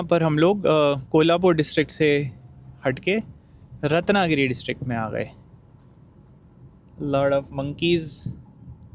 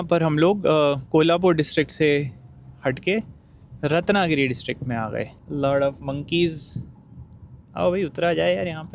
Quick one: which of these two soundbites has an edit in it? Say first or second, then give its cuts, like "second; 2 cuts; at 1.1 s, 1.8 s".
second; 1 cut; at 5.4 s